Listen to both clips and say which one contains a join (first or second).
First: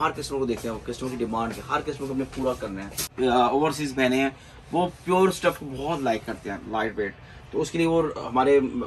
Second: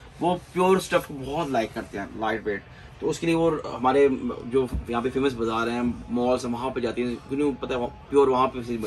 first